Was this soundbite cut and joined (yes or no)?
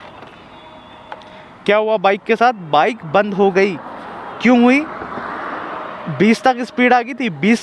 no